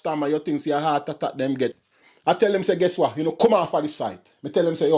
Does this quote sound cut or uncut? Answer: cut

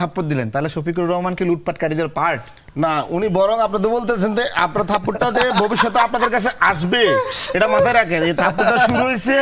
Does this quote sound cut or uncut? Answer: uncut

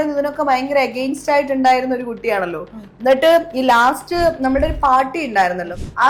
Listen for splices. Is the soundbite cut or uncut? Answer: uncut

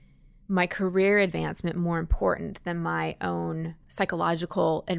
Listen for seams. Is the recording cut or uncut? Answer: cut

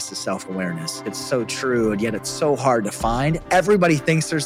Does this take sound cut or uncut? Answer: cut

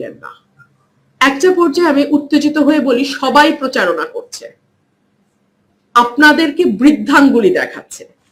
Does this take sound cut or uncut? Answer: uncut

